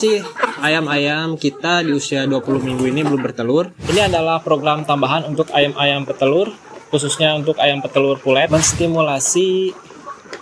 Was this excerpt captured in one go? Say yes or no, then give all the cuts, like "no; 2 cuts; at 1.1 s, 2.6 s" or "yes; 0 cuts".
no; 2 cuts; at 3.8 s, 8.5 s